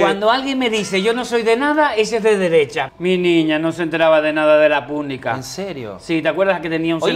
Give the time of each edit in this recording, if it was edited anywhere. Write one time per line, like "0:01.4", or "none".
0:02.8